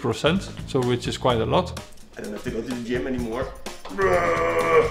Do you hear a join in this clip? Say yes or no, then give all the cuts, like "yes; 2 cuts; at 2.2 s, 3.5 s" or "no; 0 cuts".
yes; 1 cut; at 1.8 s